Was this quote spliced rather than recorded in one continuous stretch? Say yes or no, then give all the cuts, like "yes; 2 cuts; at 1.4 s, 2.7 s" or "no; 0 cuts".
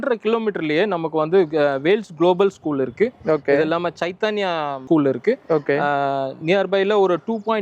no; 0 cuts